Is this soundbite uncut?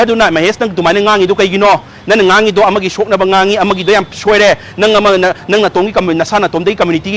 yes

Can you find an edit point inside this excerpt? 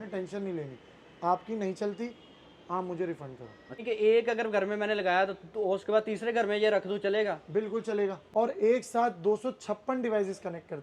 yes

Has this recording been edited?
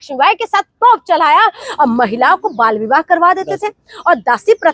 yes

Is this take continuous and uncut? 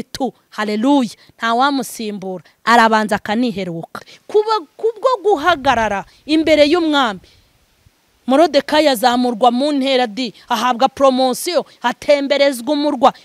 no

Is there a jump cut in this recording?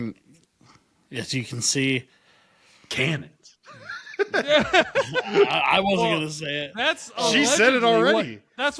no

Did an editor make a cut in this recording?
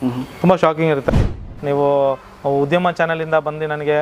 yes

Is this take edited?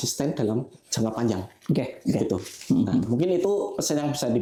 no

